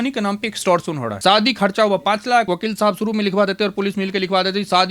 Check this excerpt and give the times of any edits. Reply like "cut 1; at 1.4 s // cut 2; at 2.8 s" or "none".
cut 1; at 1.1 s // cut 2; at 2.5 s